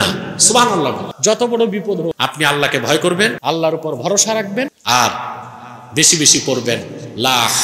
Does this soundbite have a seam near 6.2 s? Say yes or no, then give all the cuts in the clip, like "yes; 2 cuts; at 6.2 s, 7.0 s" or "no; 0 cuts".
no; 4 cuts; at 1.1 s, 2.1 s, 3.4 s, 4.8 s